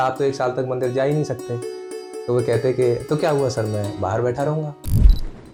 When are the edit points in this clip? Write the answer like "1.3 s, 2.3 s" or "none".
none